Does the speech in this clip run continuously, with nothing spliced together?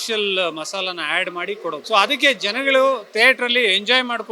no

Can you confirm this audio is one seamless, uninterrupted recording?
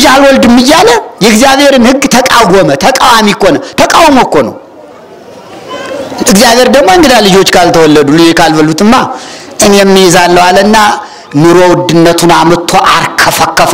yes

